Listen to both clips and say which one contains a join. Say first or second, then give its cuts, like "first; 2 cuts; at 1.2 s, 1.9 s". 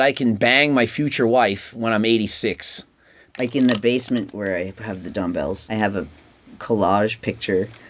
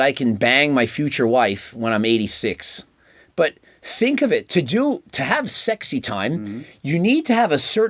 first; 3 cuts; at 3.3 s, 4.3 s, 5.6 s